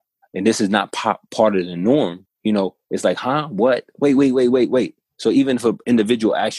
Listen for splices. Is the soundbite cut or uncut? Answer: cut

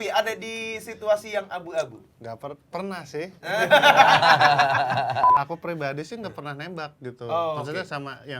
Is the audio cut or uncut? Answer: cut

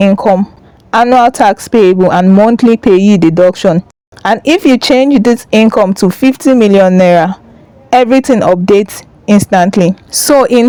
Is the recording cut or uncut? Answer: uncut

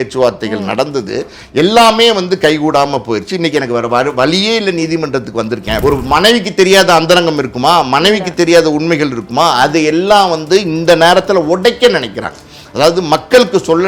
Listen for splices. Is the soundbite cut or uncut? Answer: cut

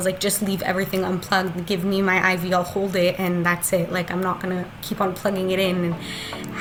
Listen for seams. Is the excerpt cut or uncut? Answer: uncut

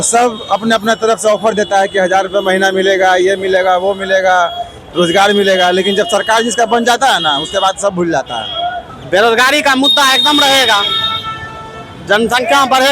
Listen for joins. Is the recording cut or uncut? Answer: cut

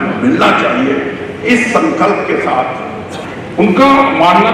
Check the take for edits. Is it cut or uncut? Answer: cut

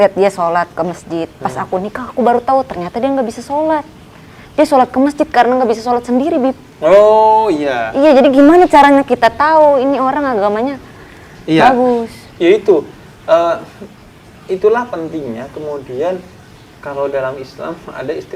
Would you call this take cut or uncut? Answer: uncut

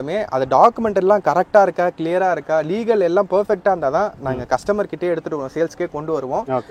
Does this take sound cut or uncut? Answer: uncut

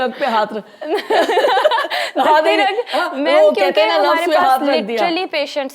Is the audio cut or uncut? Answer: uncut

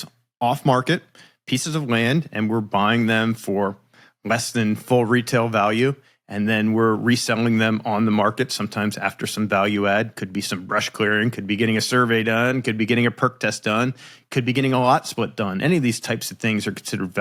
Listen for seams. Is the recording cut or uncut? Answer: uncut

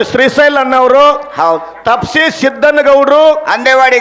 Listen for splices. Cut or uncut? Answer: uncut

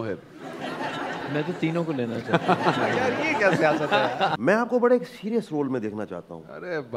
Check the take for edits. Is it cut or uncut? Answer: cut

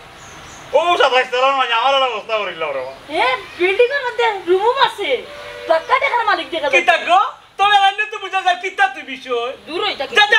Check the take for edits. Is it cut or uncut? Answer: uncut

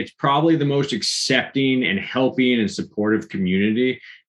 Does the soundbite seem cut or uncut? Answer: uncut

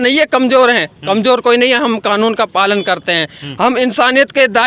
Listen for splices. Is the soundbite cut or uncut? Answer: uncut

